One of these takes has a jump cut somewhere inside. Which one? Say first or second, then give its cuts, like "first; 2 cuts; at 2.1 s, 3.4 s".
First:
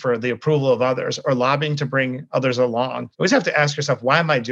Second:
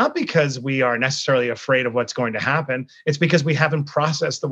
first; 1 cut; at 3.0 s